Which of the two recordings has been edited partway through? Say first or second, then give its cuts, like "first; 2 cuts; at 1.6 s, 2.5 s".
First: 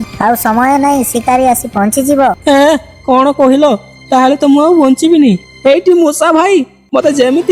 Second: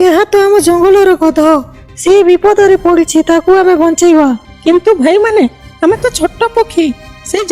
second; 2 cuts; at 1.8 s, 4.5 s